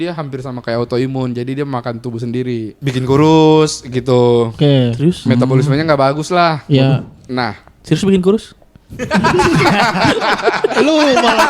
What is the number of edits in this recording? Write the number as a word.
one